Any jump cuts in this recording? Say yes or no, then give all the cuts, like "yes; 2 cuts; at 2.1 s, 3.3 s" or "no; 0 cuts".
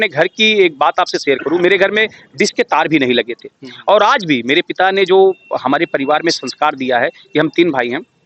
no; 0 cuts